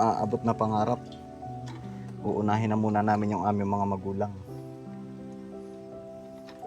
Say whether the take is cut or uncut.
cut